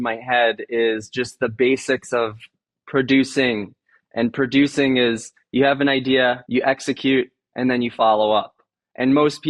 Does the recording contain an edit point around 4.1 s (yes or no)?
no